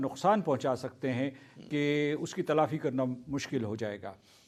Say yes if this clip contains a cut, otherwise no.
no